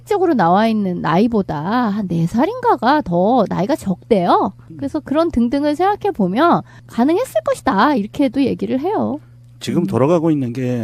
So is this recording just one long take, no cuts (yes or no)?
yes